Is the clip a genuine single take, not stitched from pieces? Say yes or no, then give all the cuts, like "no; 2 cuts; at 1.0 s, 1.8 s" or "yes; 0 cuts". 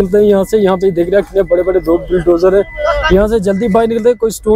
yes; 0 cuts